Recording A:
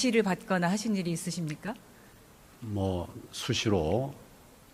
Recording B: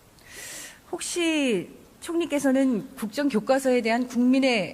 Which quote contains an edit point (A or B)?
B